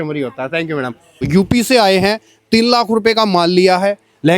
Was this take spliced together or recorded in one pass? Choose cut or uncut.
cut